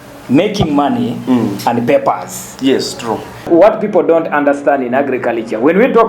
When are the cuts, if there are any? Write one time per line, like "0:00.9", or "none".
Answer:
0:03.4